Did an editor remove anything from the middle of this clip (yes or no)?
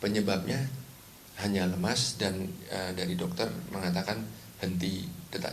yes